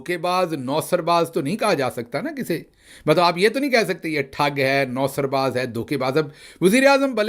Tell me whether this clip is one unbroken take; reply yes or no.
yes